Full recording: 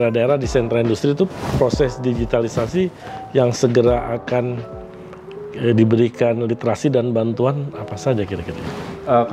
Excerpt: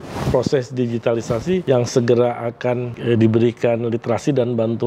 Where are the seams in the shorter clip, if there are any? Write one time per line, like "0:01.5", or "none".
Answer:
0:01.6
0:02.9